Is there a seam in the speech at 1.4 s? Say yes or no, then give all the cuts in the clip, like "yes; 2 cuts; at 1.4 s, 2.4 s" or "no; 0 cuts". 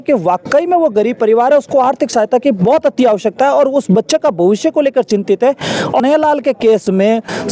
no; 1 cut; at 6.0 s